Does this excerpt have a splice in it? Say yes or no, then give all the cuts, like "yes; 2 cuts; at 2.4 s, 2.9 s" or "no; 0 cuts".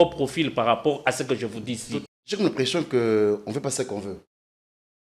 yes; 1 cut; at 2.0 s